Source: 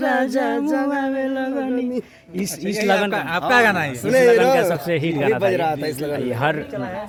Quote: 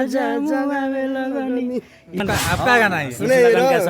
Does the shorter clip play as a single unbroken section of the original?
no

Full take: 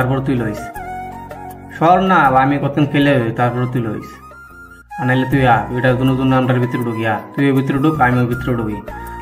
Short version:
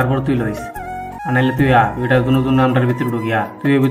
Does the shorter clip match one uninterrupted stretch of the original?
no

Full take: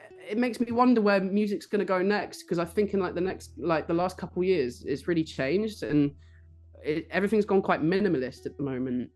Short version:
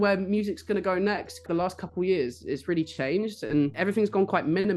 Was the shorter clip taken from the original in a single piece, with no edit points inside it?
no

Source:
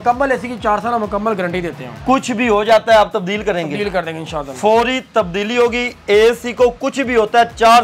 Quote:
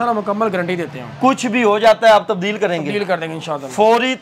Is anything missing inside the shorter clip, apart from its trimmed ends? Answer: no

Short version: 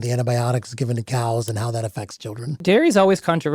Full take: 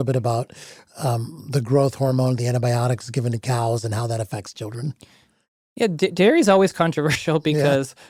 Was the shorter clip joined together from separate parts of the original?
yes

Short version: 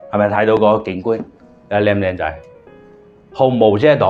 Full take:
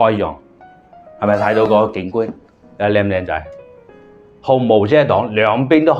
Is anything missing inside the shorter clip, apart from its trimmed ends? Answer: no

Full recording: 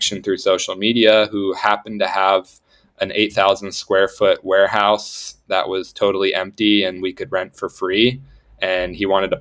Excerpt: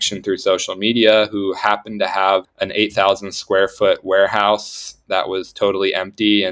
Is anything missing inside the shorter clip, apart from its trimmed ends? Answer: yes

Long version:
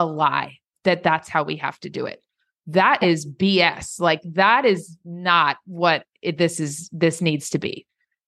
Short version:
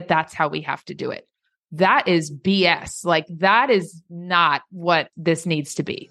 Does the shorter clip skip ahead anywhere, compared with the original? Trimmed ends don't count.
yes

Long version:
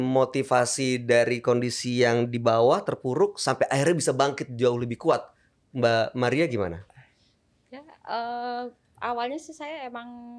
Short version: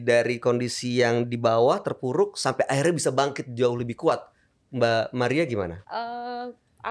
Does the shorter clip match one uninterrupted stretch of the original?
no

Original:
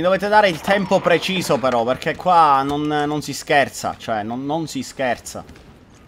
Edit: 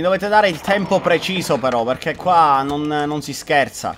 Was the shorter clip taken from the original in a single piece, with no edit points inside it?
yes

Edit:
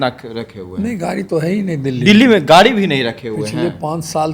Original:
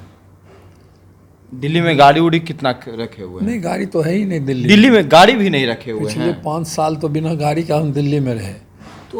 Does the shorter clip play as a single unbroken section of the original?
yes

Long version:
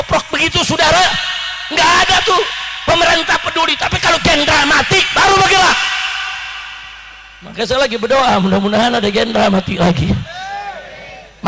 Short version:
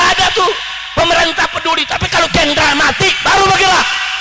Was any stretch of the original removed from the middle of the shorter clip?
no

